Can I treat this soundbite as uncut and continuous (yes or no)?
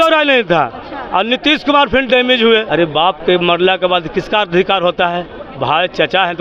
no